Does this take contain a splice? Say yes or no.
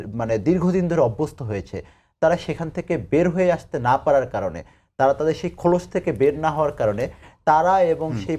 no